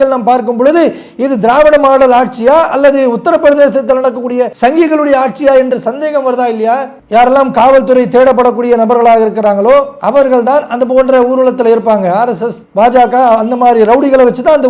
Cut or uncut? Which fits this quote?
cut